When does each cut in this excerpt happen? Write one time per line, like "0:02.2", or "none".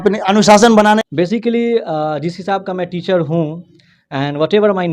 0:01.0